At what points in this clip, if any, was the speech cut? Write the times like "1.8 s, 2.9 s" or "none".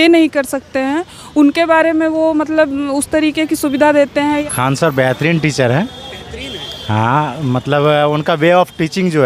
none